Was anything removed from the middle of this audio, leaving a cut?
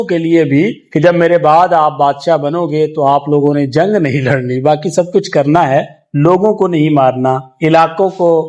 no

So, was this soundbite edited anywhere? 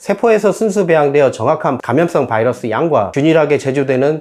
yes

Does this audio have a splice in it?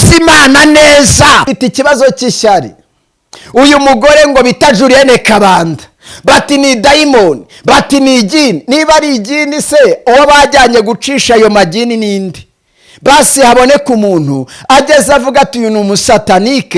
yes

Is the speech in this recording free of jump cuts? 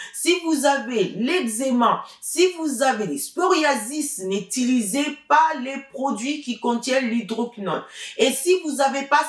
yes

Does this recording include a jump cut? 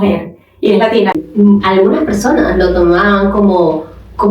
yes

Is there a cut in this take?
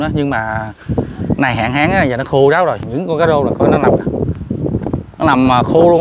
yes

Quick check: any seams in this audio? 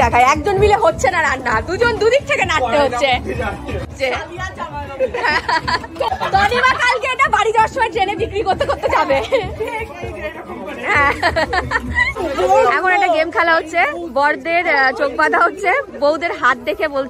yes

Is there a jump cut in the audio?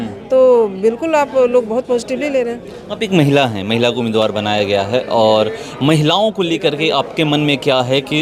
no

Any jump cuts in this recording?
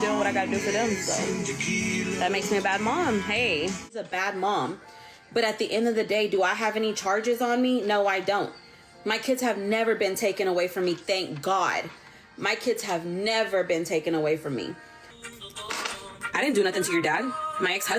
yes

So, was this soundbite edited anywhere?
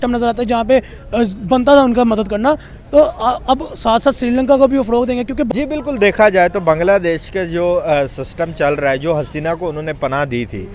yes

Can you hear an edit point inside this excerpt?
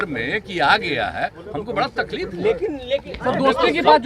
no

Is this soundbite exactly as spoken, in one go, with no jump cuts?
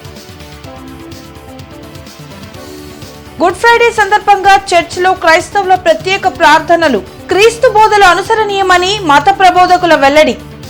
yes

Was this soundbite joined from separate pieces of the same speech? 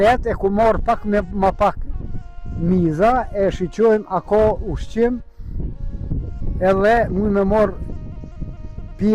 no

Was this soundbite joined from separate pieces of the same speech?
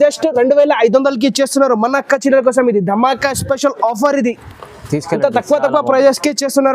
no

